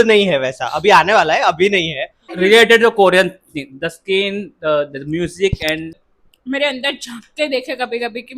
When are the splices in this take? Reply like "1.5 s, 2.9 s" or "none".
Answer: 2.2 s, 6.1 s